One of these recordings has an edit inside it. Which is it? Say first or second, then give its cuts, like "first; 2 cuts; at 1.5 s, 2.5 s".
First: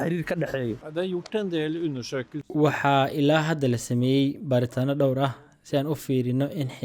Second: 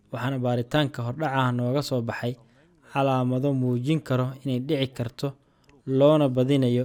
first; 2 cuts; at 0.8 s, 2.5 s